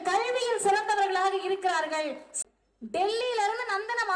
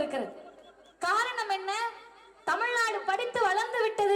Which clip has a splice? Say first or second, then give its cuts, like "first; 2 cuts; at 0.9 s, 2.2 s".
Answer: first; 1 cut; at 2.3 s